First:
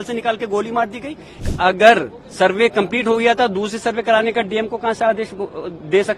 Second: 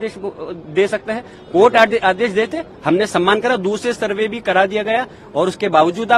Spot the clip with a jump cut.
first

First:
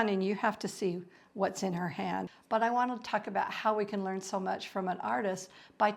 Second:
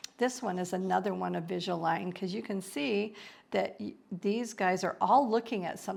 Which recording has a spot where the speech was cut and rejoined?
first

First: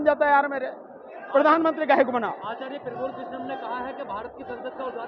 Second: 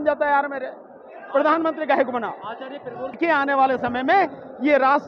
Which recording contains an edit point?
second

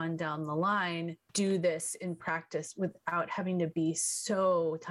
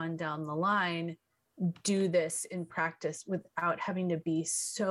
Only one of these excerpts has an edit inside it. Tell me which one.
first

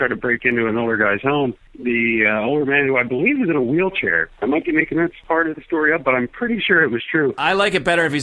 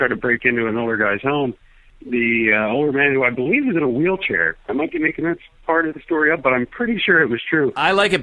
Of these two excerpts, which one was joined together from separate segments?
first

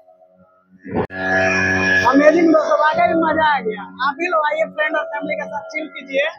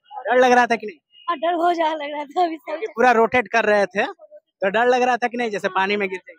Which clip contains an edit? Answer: first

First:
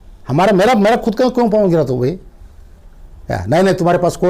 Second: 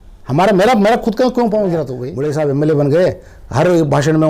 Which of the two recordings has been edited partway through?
second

